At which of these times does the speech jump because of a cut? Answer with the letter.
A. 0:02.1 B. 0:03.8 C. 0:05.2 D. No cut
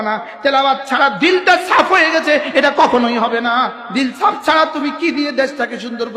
B